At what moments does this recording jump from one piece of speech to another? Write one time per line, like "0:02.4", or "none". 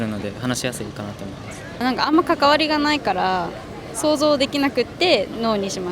0:01.7